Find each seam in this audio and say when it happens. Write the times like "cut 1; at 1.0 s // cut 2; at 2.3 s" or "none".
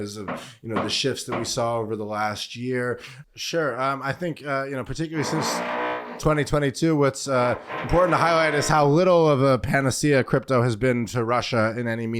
cut 1; at 3.1 s